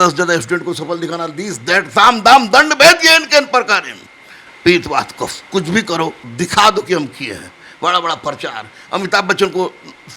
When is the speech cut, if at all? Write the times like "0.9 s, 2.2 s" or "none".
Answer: none